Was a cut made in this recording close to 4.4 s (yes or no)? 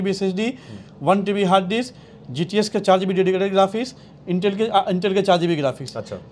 no